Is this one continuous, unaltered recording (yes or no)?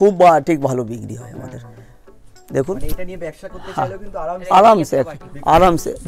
yes